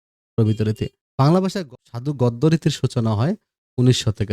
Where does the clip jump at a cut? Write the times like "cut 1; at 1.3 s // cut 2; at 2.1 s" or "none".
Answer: cut 1; at 1.6 s